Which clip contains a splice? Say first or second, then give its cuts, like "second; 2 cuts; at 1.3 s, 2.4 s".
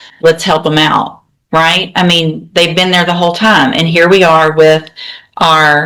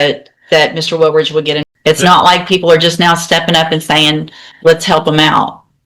second; 1 cut; at 1.6 s